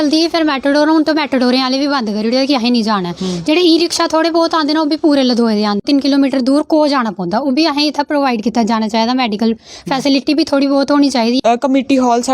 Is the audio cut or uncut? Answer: cut